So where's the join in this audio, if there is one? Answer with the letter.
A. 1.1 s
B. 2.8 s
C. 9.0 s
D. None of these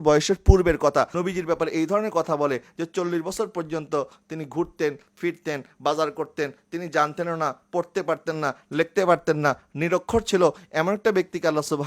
A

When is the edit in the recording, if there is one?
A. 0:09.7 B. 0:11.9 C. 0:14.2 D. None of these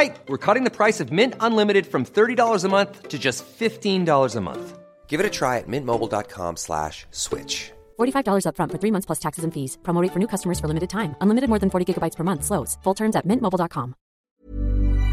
C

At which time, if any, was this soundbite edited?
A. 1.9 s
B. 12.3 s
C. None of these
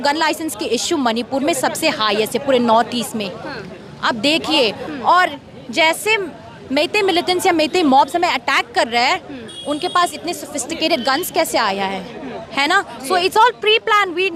C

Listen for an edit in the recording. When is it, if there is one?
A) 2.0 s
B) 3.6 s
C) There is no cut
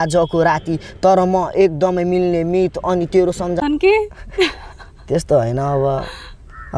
B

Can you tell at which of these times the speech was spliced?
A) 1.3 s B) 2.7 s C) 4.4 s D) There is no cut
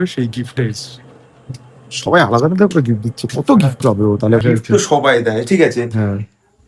C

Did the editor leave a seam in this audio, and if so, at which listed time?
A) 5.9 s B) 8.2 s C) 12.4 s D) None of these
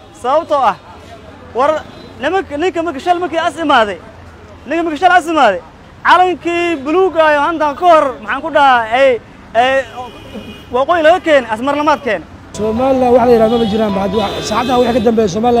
C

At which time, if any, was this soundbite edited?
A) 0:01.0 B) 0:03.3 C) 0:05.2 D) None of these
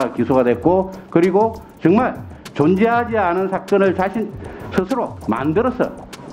C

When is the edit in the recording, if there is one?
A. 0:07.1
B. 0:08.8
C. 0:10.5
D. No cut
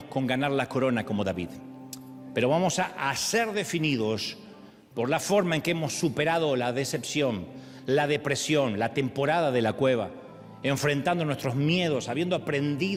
D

